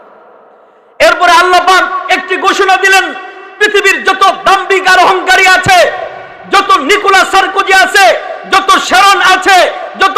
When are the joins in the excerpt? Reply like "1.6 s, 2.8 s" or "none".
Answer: none